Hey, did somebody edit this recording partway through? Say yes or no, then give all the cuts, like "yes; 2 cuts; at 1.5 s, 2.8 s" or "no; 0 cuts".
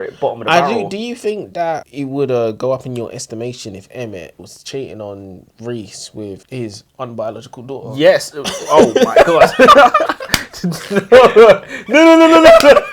yes; 3 cuts; at 1.8 s, 4.5 s, 6.4 s